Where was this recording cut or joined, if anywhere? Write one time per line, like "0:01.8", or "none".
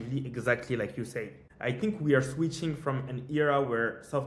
0:01.4